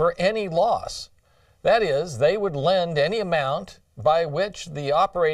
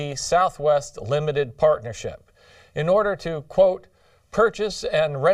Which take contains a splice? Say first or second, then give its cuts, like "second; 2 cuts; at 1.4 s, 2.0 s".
first; 1 cut; at 2.7 s